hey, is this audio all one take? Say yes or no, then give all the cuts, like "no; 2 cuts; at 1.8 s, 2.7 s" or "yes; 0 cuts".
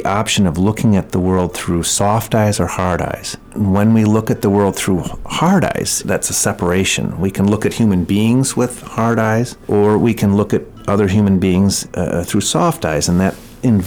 no; 4 cuts; at 3.5 s, 6.0 s, 9.6 s, 11.8 s